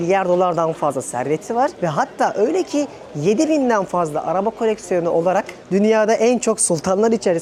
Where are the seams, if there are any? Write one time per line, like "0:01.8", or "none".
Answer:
none